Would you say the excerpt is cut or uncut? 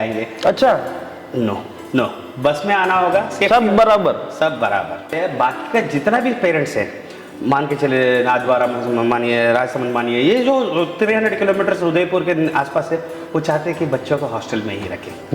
cut